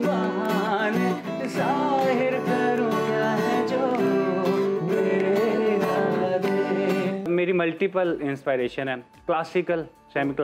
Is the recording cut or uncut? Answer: cut